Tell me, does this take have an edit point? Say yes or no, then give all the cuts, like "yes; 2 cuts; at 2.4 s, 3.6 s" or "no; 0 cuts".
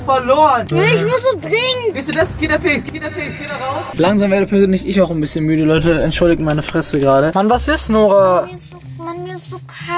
yes; 2 cuts; at 3.9 s, 7.3 s